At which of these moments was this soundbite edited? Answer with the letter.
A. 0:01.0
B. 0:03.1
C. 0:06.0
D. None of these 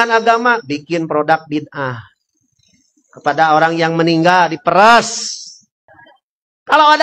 C